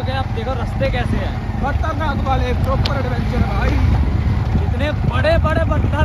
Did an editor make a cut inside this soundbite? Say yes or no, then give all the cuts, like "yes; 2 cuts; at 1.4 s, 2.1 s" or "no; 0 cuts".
no; 0 cuts